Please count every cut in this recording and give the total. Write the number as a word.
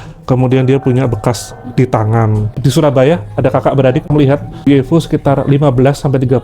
two